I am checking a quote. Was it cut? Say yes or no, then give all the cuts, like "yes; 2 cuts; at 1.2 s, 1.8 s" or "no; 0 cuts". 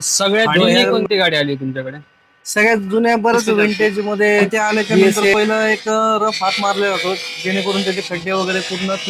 yes; 1 cut; at 5.3 s